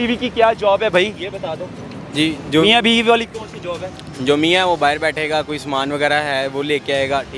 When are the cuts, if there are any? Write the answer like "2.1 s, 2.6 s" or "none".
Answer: none